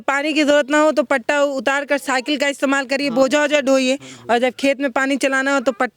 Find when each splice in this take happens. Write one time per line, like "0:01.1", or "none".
none